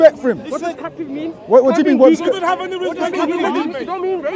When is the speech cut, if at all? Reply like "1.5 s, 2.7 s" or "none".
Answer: none